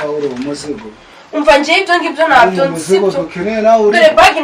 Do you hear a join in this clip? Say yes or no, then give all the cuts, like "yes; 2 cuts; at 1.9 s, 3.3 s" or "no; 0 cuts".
no; 0 cuts